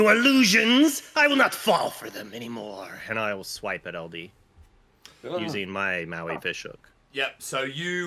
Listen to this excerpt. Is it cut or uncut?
uncut